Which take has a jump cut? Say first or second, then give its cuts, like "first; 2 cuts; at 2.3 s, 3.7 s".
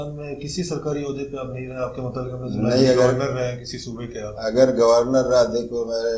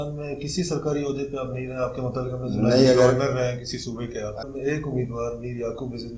second; 1 cut; at 4.4 s